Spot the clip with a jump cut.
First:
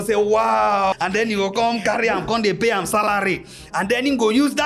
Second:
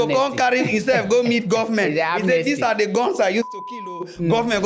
first; 1 cut; at 0.9 s

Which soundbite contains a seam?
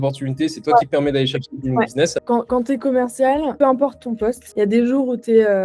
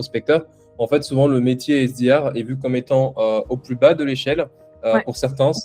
first; 3 cuts; at 2.2 s, 3.5 s, 4.4 s

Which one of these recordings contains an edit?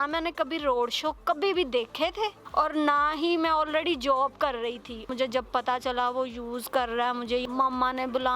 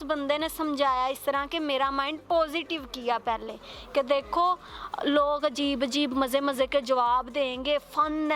first; 3 cuts; at 2.4 s, 5.1 s, 7.4 s

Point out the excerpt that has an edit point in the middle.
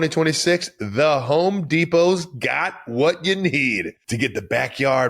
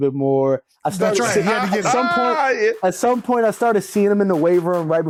first; 1 cut; at 4.0 s

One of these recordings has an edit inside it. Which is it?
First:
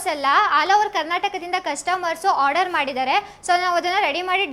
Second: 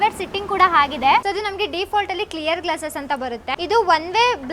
second; 2 cuts; at 1.2 s, 3.5 s

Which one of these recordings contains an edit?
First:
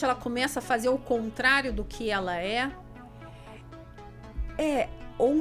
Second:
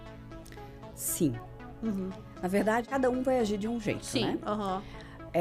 second; 1 cut; at 2.9 s

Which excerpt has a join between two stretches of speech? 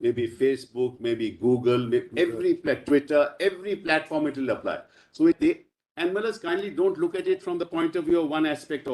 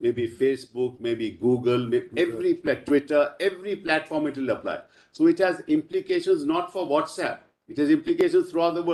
first; 1 cut; at 5.4 s

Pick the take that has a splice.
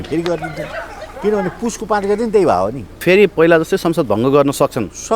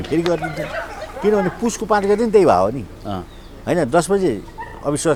first; 1 cut; at 3.0 s

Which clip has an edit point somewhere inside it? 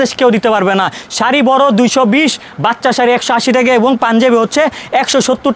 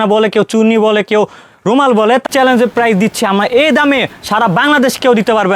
second; 1 cut; at 2.2 s

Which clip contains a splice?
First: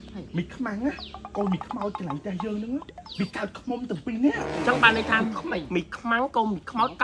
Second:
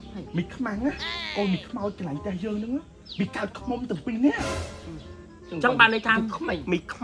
first; 1 cut; at 4.4 s

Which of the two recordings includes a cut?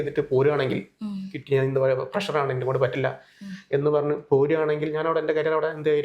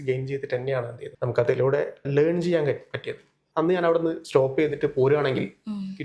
second; 3 cuts; at 1.0 s, 2.0 s, 3.4 s

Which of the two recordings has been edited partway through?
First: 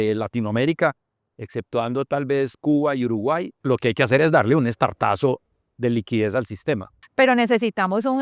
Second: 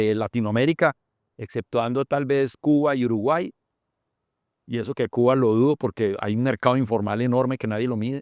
first; 2 cuts; at 3.6 s, 7.0 s

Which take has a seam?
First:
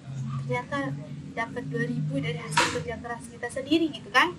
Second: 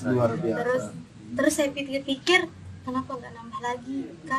second; 1 cut; at 3.1 s

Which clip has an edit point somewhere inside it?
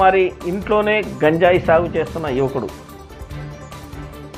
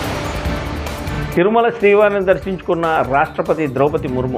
second; 1 cut; at 1.1 s

